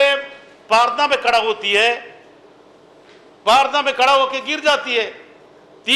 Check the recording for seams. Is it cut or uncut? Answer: uncut